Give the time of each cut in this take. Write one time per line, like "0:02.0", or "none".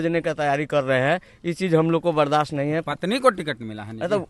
none